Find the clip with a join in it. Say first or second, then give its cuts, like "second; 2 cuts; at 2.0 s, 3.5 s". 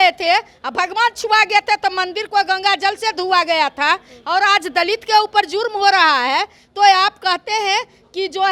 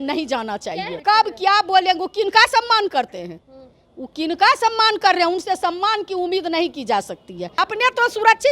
second; 2 cuts; at 0.9 s, 7.6 s